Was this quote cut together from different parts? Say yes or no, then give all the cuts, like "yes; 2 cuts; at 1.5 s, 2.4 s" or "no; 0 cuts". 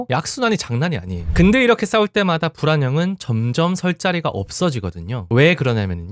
yes; 1 cut; at 1.2 s